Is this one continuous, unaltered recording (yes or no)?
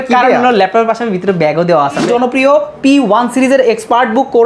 no